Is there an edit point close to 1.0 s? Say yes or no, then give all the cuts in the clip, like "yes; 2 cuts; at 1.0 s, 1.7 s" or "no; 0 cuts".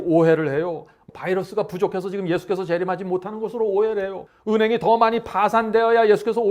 yes; 2 cuts; at 1.0 s, 4.3 s